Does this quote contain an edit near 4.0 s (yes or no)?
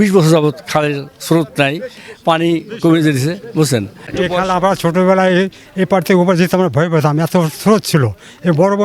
yes